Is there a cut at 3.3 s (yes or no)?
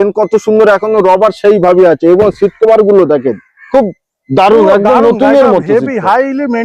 no